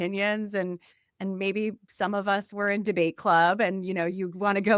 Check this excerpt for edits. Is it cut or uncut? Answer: uncut